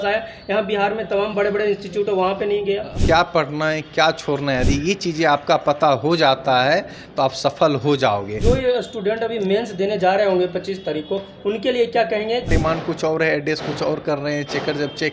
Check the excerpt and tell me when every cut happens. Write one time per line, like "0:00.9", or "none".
0:03.0
0:08.3
0:12.5

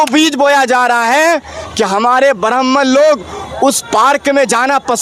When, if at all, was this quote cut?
none

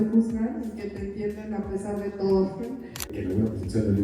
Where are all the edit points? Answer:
0:03.1

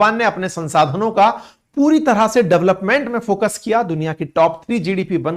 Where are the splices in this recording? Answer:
none

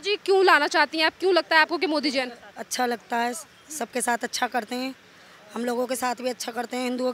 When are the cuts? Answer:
none

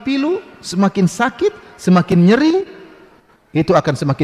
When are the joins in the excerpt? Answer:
none

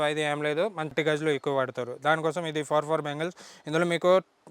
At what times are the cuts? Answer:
0:00.9

